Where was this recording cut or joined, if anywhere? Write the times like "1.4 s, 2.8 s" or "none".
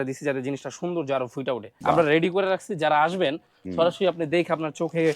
1.7 s